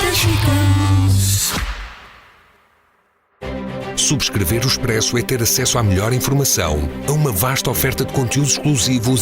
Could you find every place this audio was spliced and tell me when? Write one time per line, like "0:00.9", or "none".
0:01.4